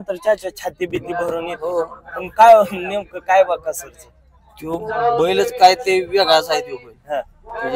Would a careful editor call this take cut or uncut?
uncut